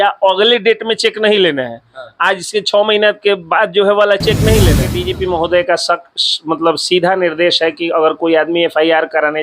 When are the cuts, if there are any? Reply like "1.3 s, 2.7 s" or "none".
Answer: 4.9 s